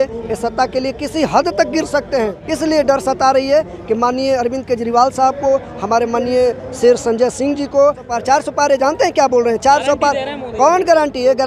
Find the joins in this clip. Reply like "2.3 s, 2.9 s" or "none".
2.4 s, 8.1 s